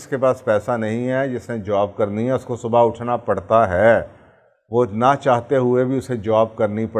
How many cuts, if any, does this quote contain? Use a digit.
0